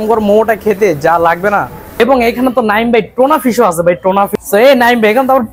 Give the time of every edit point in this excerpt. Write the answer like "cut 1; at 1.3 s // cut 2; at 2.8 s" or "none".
cut 1; at 1.8 s // cut 2; at 4.3 s